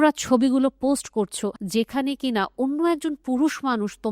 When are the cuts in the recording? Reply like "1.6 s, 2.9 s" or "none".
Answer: 1.6 s